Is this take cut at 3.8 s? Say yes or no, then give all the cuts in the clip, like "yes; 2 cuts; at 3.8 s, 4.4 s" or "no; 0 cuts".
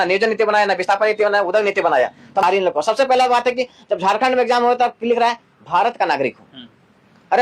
no; 1 cut; at 2.4 s